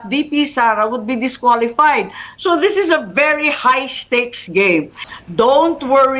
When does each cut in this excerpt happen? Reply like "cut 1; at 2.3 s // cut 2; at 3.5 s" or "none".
cut 1; at 5.0 s